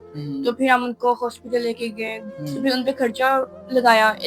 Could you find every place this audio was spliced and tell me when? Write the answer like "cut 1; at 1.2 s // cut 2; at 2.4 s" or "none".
cut 1; at 2.2 s

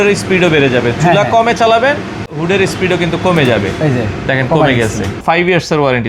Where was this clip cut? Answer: cut 1; at 2.3 s // cut 2; at 5.2 s

